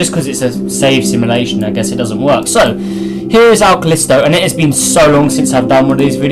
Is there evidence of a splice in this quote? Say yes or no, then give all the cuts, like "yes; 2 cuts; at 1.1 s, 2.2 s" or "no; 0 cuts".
yes; 1 cut; at 5.1 s